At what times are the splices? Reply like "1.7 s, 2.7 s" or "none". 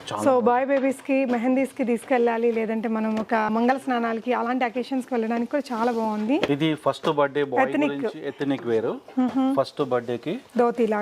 6.5 s